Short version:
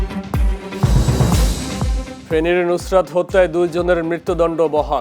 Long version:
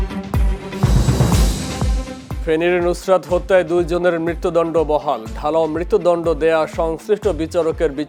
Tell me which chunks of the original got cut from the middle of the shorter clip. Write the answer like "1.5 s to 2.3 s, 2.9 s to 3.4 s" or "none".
2.1 s to 2.3 s